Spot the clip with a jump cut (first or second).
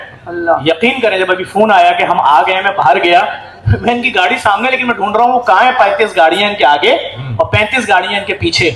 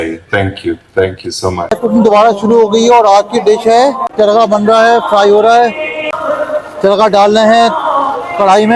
second